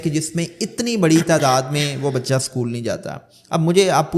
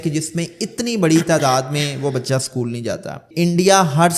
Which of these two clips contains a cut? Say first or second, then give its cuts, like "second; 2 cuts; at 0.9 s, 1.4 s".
second; 1 cut; at 3.3 s